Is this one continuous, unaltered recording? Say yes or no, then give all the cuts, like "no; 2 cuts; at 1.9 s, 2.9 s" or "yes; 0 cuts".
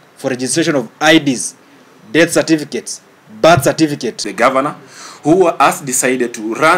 no; 1 cut; at 4.2 s